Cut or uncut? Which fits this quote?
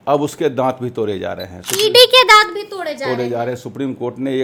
uncut